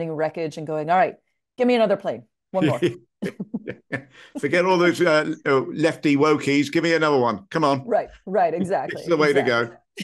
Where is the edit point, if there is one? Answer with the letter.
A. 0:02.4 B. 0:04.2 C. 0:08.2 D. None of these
D